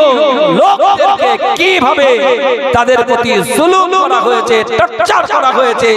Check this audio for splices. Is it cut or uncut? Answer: uncut